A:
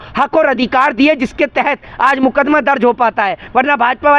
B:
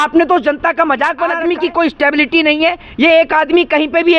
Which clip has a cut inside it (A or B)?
B